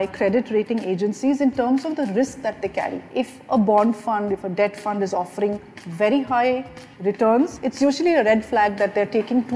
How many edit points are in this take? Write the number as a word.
two